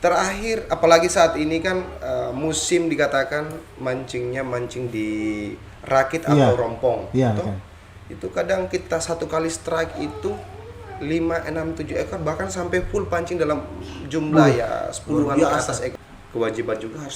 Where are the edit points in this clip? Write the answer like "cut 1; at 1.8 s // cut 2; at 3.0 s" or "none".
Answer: cut 1; at 16.0 s